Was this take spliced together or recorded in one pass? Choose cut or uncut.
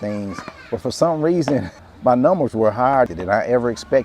cut